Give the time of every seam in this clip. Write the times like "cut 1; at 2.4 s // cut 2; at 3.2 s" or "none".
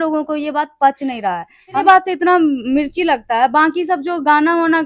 cut 1; at 1.8 s